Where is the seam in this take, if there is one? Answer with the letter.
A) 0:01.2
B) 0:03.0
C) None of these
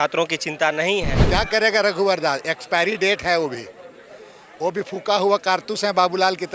A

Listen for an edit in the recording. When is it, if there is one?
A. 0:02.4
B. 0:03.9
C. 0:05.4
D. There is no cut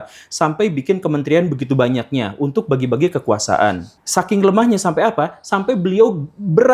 B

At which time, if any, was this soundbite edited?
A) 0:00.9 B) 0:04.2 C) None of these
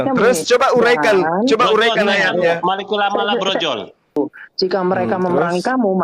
B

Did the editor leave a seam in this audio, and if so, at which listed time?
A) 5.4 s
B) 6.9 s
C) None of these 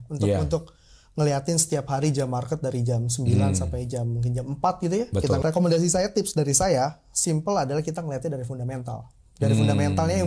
A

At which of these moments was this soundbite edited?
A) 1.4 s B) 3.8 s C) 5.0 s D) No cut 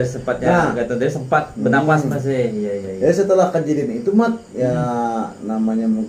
D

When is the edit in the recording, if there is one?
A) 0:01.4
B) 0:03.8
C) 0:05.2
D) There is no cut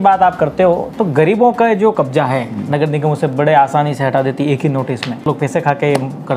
C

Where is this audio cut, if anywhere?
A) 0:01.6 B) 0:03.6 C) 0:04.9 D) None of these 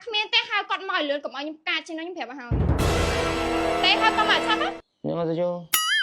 C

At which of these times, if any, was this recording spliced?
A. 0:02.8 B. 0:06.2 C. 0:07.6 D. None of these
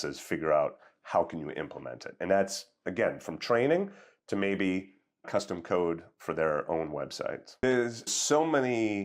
C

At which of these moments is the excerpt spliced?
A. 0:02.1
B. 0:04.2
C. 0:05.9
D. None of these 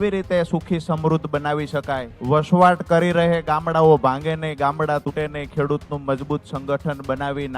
A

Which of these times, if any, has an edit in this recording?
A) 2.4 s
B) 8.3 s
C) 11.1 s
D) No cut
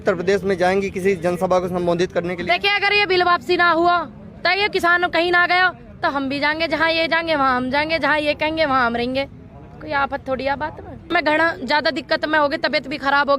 C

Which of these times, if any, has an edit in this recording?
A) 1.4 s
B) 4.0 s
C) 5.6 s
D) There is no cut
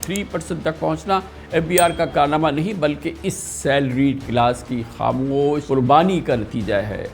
C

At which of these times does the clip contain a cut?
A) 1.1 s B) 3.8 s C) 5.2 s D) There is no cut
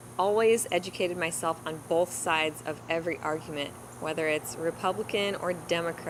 D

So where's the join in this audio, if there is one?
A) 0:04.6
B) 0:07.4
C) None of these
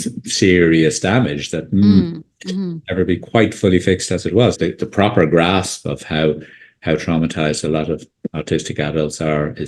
A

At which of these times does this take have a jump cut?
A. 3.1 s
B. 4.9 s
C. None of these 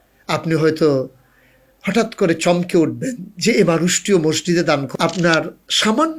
B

